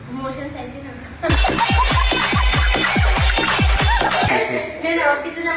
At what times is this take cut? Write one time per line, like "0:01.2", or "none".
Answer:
0:04.3